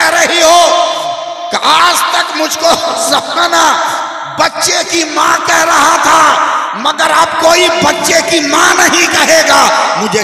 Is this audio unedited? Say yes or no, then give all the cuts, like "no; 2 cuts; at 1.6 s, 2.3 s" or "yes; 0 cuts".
yes; 0 cuts